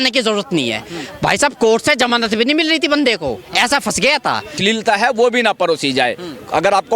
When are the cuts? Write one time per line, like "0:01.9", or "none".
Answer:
0:04.6